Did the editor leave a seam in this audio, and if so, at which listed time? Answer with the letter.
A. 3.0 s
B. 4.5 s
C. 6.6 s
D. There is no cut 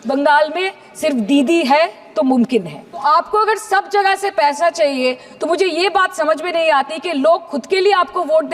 A